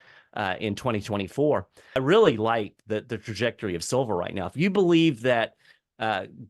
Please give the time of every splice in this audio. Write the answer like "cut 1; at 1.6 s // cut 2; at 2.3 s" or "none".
cut 1; at 1.9 s